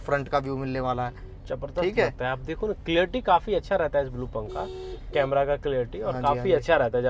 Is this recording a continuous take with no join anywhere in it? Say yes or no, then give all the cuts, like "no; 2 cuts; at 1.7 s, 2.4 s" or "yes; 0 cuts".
yes; 0 cuts